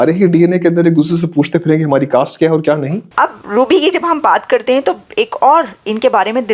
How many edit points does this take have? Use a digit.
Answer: 1